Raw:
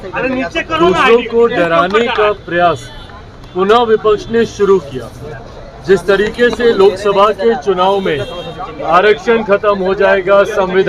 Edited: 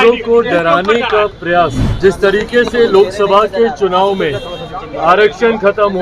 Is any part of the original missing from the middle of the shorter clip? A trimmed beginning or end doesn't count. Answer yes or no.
yes